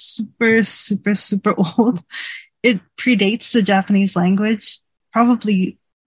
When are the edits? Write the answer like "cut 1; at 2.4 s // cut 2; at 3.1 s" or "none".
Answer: cut 1; at 4.9 s